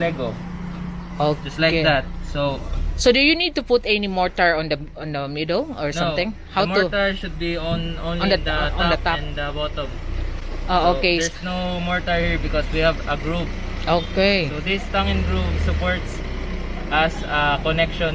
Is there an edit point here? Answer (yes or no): no